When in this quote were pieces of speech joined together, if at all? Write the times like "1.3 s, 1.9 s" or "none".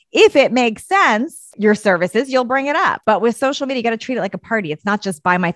1.4 s, 3.0 s